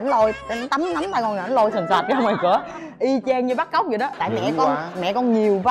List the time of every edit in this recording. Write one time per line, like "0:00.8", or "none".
0:04.1